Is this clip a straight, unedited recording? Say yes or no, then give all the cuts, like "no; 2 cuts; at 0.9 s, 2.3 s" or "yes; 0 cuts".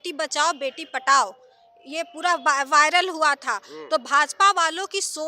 yes; 0 cuts